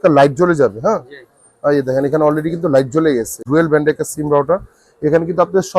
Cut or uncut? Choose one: cut